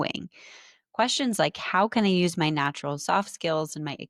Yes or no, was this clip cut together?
no